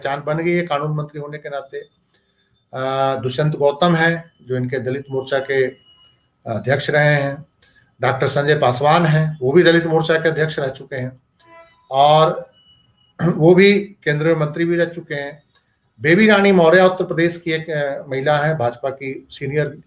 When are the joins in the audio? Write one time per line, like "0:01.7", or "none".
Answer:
none